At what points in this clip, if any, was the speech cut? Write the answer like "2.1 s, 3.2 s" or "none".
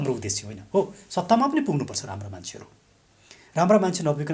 none